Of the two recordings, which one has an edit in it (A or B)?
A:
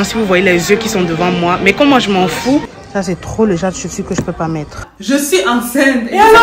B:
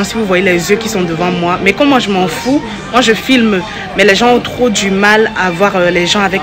A